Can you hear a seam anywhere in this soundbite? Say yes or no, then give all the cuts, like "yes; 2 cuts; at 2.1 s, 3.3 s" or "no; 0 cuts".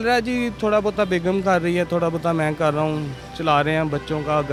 no; 0 cuts